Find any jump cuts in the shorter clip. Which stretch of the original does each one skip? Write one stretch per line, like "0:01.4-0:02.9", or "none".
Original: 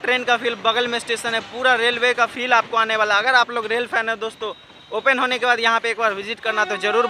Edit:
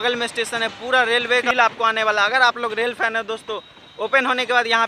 0:02.2-0:02.4